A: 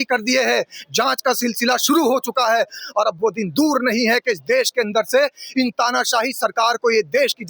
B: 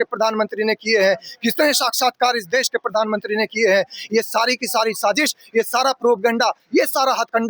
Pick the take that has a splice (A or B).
A